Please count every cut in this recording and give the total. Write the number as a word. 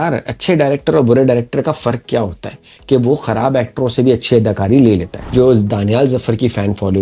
one